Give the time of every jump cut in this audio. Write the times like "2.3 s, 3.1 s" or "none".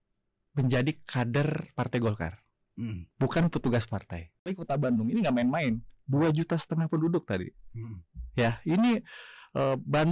4.6 s